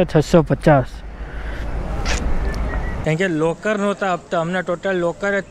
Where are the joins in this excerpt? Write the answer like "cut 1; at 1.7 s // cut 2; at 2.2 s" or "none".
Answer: cut 1; at 2.9 s